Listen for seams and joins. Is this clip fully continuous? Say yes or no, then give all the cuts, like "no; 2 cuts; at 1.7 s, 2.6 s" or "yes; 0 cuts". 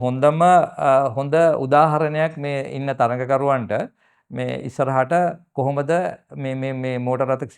yes; 0 cuts